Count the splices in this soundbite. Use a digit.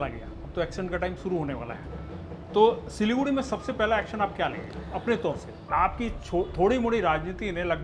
1